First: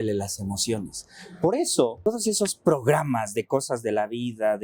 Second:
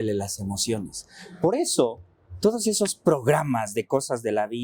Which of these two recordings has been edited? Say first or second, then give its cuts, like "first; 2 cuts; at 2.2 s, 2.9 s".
first; 1 cut; at 2.1 s